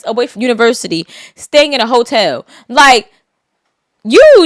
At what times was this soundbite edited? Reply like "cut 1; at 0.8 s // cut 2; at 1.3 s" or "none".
none